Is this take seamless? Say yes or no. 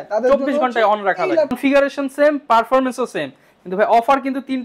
no